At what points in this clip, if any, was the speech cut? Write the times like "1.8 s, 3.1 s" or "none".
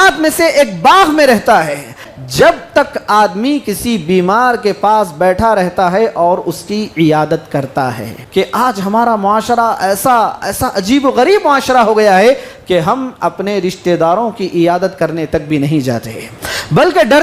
2.1 s, 8.2 s